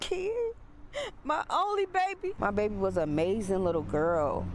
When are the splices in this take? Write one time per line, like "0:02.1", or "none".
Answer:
0:02.3